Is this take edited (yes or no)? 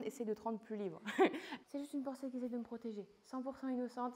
yes